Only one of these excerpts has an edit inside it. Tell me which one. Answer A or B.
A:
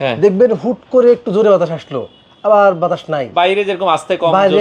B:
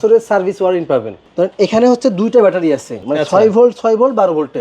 B